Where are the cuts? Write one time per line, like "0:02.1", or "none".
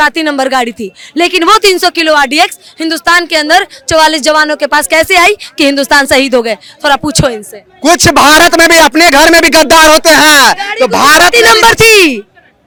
none